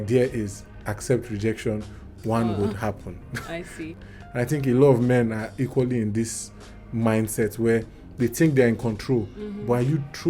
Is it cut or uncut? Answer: cut